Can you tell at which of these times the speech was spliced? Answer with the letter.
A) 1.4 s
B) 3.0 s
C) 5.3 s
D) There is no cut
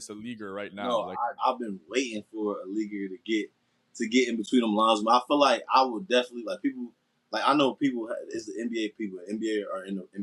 A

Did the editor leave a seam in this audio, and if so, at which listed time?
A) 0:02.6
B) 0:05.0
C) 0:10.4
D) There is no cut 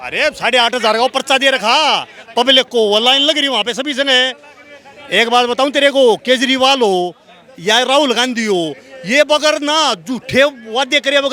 D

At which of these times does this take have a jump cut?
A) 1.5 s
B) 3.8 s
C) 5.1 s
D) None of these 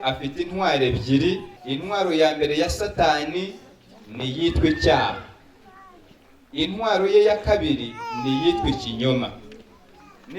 A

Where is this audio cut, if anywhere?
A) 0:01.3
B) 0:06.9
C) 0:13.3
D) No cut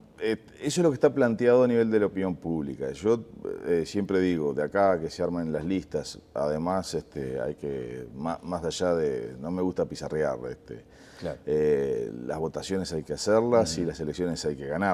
D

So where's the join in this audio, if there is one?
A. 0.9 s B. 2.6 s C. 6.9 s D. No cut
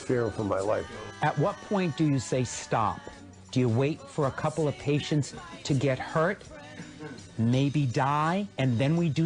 A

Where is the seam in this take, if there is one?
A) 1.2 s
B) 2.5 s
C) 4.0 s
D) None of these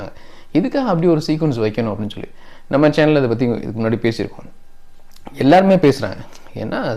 D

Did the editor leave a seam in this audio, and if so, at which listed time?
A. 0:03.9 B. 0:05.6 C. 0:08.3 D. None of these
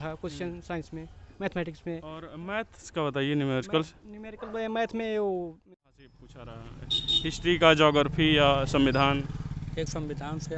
B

